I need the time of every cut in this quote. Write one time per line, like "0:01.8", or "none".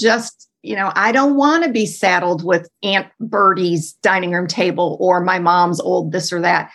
0:02.7